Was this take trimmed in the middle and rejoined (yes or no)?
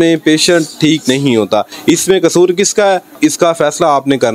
yes